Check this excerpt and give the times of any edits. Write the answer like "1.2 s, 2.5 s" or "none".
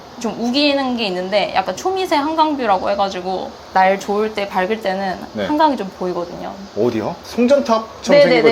3.5 s